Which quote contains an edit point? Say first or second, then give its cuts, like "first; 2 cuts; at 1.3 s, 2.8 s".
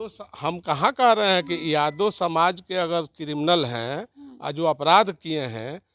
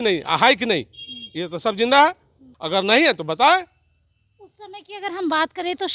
second; 1 cut; at 2.5 s